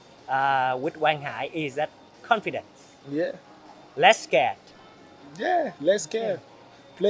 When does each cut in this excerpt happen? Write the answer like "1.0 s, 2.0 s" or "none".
none

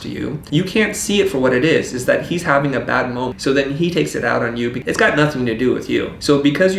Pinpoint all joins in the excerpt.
3.3 s, 4.8 s

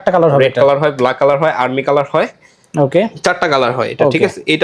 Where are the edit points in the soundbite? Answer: none

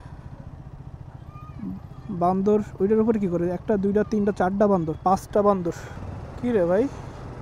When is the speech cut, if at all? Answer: 5.9 s

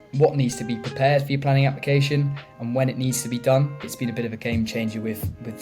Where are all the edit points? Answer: 3.9 s

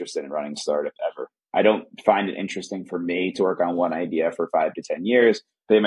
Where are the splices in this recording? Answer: 1.3 s

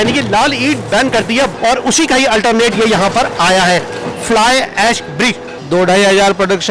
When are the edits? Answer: 1.5 s, 5.5 s

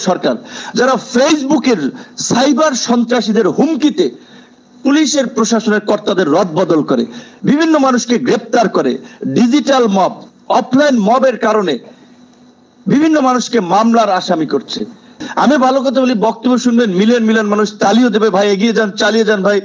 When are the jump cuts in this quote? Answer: 15.1 s

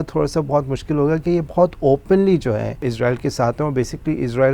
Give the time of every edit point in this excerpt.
2.9 s

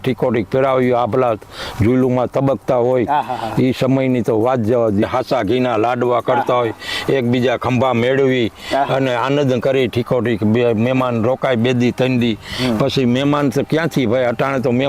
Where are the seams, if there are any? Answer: 5.0 s

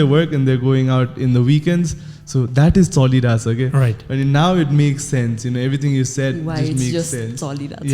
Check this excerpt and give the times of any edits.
none

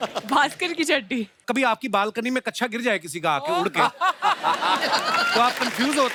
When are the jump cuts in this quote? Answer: none

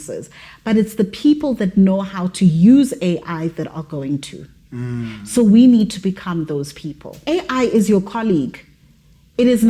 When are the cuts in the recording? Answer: 7.2 s

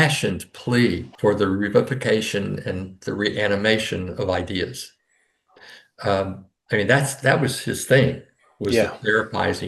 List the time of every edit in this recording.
1.1 s

